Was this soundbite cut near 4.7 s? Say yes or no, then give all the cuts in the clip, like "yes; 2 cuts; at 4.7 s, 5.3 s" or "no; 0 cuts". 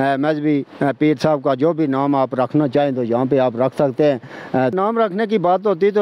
yes; 1 cut; at 4.7 s